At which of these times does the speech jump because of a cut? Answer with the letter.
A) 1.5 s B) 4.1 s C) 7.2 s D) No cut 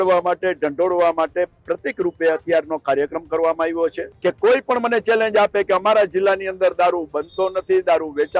B